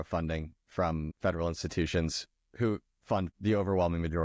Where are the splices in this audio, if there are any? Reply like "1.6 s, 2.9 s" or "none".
1.1 s, 3.3 s